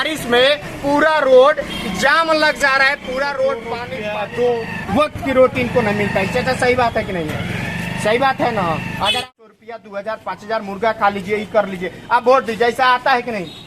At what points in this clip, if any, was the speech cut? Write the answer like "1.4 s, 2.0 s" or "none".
3.9 s, 9.3 s